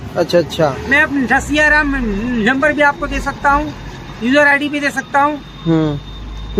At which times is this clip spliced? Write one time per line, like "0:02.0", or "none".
none